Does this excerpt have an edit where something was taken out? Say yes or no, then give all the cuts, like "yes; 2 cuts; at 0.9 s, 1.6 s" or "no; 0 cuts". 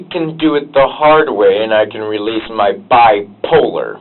no; 0 cuts